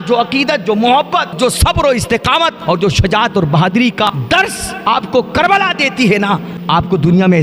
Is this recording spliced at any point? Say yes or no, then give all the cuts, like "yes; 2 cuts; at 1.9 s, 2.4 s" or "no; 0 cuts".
yes; 4 cuts; at 1.4 s, 2.6 s, 4.1 s, 6.5 s